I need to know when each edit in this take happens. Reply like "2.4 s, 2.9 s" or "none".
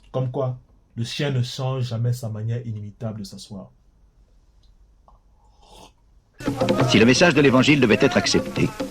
0.8 s, 6.4 s